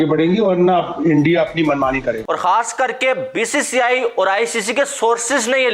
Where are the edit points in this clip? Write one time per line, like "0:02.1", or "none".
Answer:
0:02.2